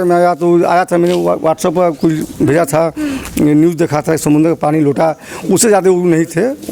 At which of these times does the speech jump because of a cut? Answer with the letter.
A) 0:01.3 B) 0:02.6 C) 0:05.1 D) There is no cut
D